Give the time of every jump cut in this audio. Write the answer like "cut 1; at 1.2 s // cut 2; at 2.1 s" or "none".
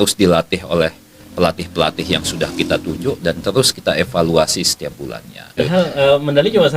cut 1; at 5.6 s